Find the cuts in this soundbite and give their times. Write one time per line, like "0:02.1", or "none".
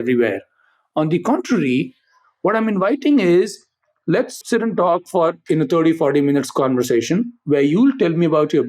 0:04.4